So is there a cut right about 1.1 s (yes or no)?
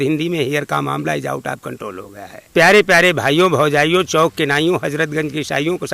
no